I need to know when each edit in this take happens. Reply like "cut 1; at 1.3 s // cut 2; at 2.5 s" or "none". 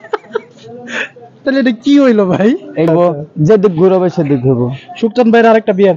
cut 1; at 2.9 s